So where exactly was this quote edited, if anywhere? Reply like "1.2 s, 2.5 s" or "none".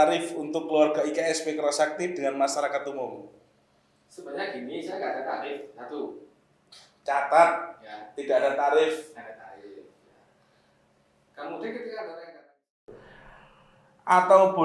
12.8 s